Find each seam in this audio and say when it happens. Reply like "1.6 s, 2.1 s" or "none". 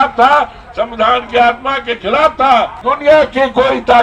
2.8 s